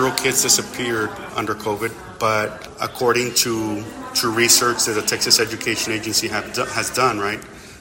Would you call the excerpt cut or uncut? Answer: cut